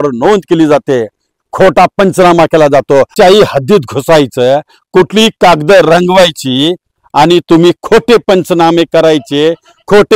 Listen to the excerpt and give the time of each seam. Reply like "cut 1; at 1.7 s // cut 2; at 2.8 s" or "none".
cut 1; at 3.1 s